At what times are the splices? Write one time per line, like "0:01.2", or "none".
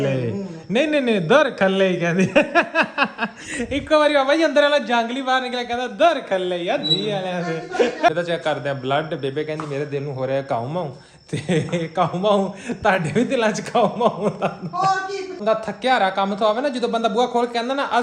0:08.1
0:15.4